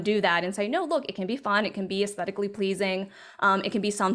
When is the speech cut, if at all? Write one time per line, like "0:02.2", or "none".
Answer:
none